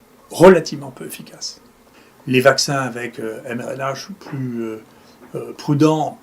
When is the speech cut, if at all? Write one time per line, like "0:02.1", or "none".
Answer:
0:01.8